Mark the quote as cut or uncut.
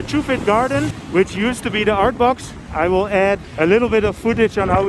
cut